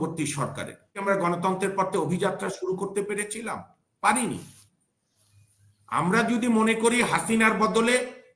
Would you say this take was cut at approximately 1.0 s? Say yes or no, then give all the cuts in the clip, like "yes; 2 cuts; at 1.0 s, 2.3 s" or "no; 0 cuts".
yes; 1 cut; at 1.0 s